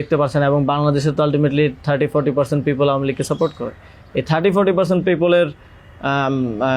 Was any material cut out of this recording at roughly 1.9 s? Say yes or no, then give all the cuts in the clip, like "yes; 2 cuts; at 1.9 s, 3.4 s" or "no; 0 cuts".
no; 0 cuts